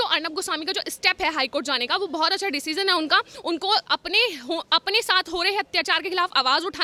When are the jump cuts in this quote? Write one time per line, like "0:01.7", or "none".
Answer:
none